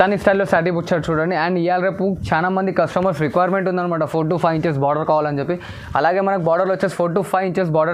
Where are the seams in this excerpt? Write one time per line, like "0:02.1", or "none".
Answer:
none

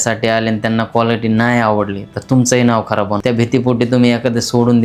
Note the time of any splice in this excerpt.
none

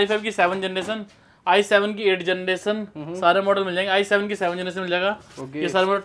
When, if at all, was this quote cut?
none

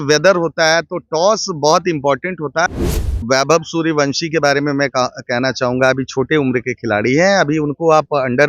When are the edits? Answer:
0:03.1

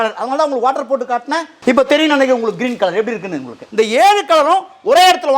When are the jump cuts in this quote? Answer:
0:01.5
0:03.6

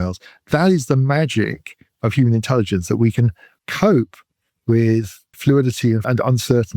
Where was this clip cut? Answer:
0:03.5
0:05.2
0:06.0

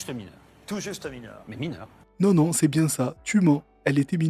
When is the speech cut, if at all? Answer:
none

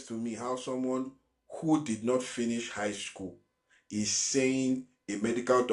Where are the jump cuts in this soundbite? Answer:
none

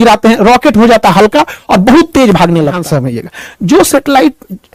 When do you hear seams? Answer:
0:02.8

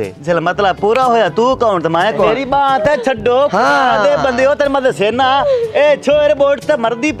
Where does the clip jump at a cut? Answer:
0:02.4

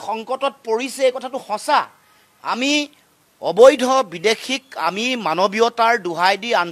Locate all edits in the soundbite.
none

